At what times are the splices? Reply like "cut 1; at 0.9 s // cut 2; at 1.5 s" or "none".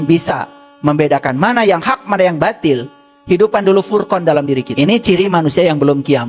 cut 1; at 4.7 s